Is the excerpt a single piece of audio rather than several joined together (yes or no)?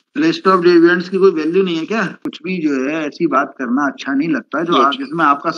no